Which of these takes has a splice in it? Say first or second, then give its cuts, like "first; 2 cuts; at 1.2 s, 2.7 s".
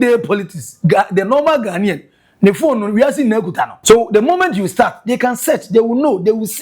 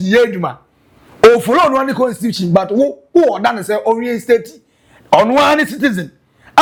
first; 1 cut; at 3.8 s